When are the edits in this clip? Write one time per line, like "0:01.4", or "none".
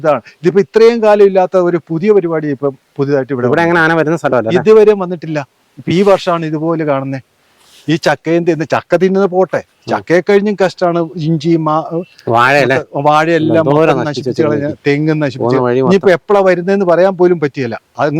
none